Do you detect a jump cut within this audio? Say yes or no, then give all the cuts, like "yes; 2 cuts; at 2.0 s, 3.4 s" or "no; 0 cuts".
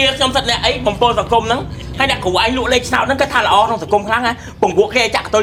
no; 0 cuts